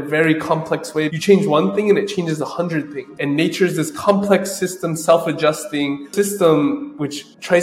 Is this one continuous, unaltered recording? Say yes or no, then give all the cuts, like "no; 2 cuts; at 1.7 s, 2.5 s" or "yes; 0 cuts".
no; 1 cut; at 1.1 s